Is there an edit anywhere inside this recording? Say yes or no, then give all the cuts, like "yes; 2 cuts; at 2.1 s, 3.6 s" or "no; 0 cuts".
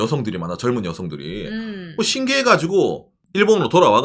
no; 0 cuts